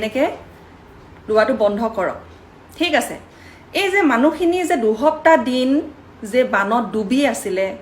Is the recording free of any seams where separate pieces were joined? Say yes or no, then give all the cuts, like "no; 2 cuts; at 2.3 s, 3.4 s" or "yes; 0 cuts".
yes; 0 cuts